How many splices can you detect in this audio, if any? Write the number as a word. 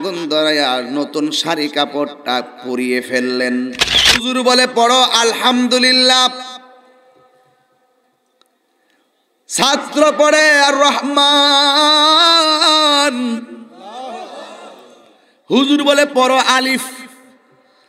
one